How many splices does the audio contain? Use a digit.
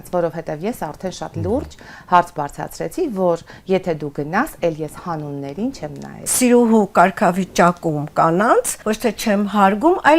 2